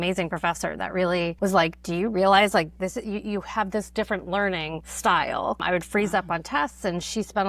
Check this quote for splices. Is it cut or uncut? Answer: cut